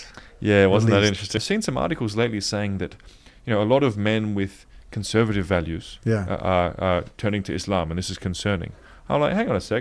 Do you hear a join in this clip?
yes; 1 cut; at 1.4 s

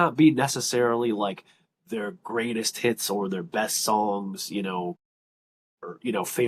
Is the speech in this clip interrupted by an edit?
no; 0 cuts

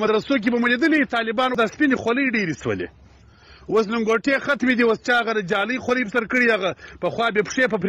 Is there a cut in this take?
yes; 1 cut; at 1.5 s

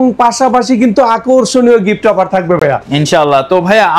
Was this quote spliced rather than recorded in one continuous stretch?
no; 0 cuts

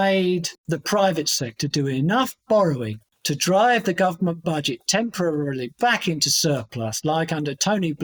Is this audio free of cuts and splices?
yes; 0 cuts

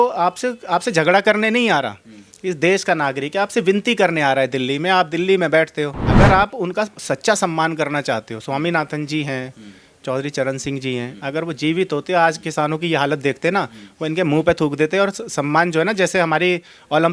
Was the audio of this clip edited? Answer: yes; 1 cut; at 6.0 s

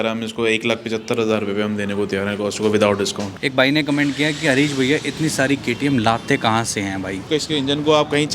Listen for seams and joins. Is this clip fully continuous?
no; 2 cuts; at 3.3 s, 7.3 s

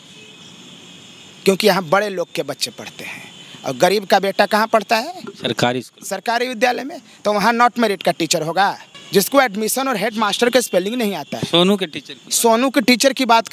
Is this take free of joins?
no; 1 cut; at 8.9 s

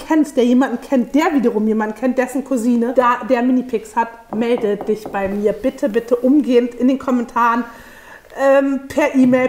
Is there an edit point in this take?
no; 0 cuts

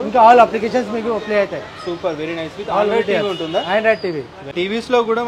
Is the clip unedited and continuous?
no; 1 cut; at 4.4 s

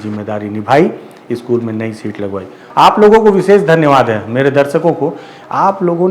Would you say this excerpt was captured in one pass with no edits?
no; 1 cut; at 2.6 s

